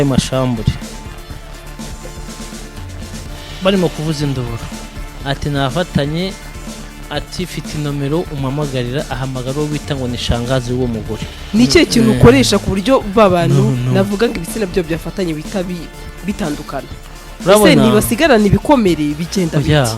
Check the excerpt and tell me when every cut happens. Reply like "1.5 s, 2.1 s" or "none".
11.3 s